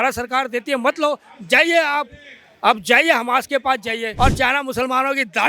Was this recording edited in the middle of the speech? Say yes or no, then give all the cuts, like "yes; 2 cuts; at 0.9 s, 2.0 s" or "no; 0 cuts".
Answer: yes; 1 cut; at 4.1 s